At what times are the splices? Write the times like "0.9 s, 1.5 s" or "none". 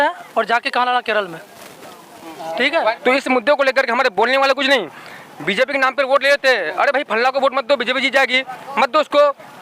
2.9 s